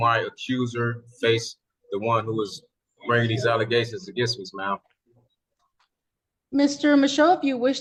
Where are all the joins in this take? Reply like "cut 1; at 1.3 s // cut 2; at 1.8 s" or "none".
none